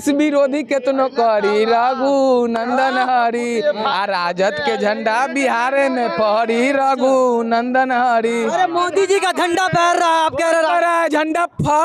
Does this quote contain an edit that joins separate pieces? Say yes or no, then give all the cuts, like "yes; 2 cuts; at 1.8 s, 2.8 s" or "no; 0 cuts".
no; 0 cuts